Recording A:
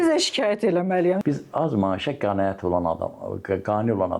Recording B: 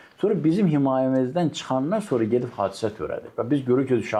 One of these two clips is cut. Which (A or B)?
A